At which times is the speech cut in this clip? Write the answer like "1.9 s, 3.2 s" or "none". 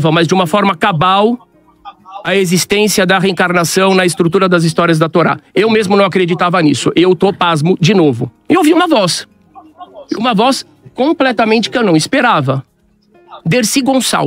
8.3 s